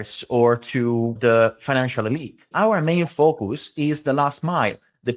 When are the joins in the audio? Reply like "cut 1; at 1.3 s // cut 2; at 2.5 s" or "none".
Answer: cut 1; at 1.2 s // cut 2; at 2.5 s